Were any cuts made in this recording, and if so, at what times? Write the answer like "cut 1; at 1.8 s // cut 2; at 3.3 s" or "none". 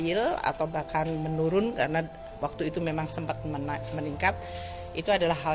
none